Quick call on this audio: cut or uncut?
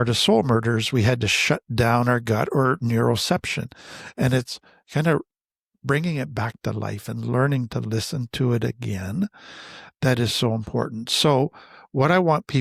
uncut